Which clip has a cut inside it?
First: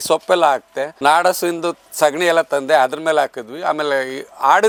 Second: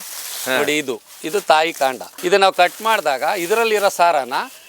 second; 1 cut; at 2.1 s

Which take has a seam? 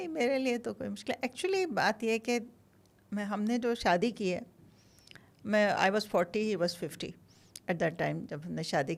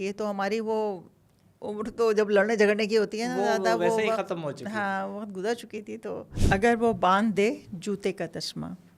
second; 1 cut; at 6.3 s

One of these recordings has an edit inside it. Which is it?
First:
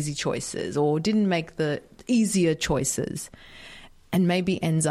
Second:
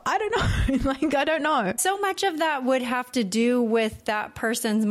second; 1 cut; at 1.8 s

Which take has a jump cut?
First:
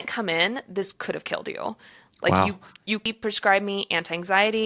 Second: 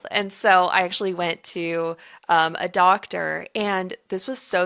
first; 1 cut; at 3.1 s

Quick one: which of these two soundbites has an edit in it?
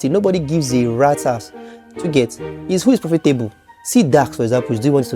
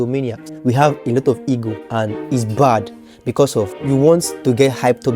second; 3 cuts; at 0.8 s, 1.8 s, 3.8 s

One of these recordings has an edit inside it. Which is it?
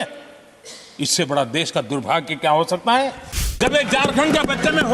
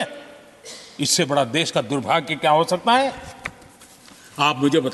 first; 1 cut; at 3.6 s

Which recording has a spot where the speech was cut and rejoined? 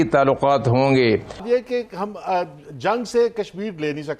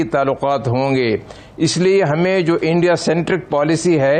first; 1 cut; at 1.4 s

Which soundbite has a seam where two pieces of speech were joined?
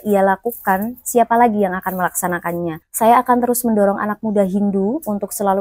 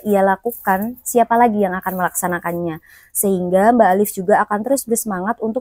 first; 1 cut; at 2.8 s

